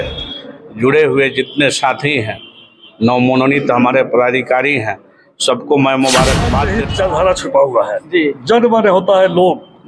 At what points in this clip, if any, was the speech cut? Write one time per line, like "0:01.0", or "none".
0:06.8